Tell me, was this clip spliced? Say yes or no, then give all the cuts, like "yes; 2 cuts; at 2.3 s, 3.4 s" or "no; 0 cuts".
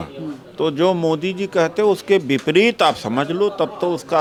no; 0 cuts